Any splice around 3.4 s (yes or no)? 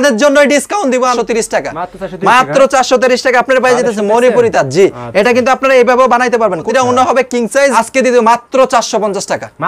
no